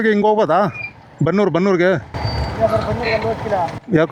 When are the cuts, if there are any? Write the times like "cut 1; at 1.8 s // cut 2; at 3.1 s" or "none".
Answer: none